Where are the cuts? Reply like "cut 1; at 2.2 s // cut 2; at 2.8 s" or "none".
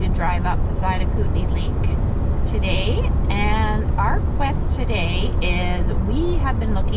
none